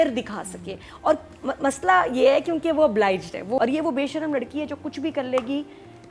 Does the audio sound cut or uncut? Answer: cut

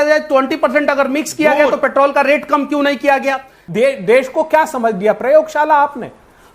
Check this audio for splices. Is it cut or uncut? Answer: cut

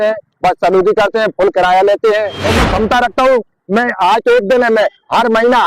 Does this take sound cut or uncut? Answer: cut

